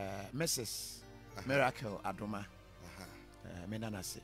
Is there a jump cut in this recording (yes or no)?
no